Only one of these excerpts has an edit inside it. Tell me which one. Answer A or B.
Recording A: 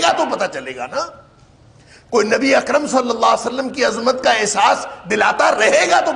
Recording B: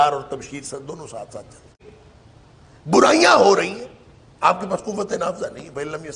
B